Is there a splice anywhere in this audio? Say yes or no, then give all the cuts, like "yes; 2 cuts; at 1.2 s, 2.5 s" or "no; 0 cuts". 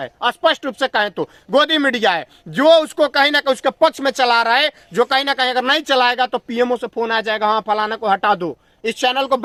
no; 0 cuts